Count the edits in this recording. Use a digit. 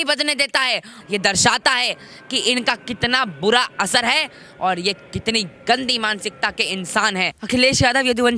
2